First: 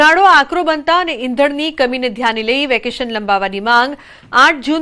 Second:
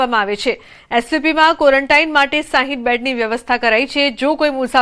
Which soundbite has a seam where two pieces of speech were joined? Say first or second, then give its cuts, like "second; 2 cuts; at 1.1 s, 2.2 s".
first; 1 cut; at 1.1 s